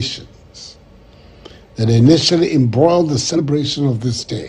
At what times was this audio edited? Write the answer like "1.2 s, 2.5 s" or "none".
3.4 s

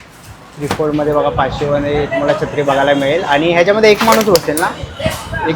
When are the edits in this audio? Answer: none

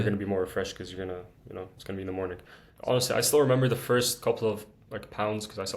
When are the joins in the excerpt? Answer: 2.6 s

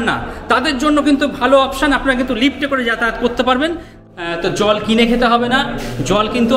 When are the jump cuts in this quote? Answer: 3.9 s

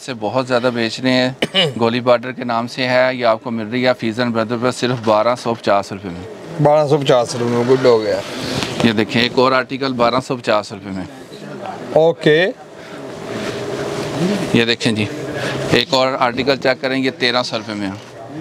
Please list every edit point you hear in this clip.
none

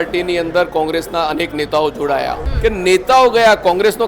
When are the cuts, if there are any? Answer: 2.4 s

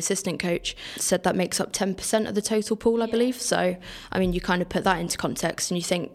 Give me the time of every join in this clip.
1.0 s

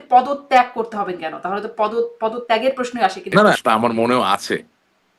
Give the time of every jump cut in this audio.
3.6 s

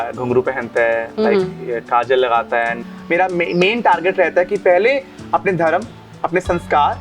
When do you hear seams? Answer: 2.8 s

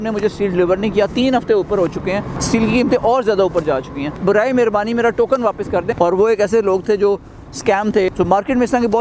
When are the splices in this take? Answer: 2.3 s, 4.2 s, 5.9 s, 8.1 s

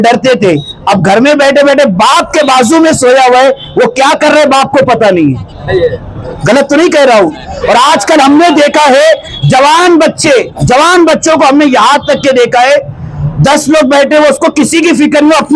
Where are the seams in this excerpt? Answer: none

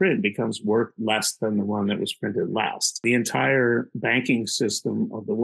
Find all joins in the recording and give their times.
3.0 s

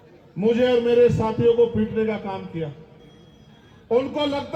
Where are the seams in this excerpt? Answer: none

